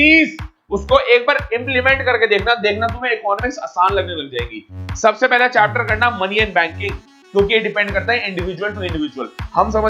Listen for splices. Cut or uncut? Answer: cut